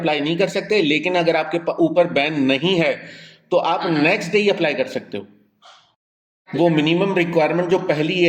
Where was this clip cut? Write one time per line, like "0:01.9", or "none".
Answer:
0:06.4